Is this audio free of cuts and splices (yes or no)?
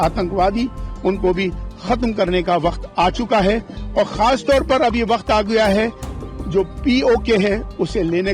yes